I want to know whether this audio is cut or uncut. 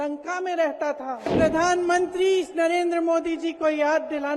cut